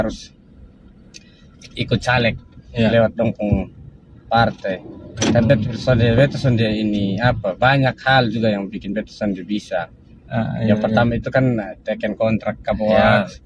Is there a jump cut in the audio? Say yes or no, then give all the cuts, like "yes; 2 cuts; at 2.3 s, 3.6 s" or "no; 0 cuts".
no; 0 cuts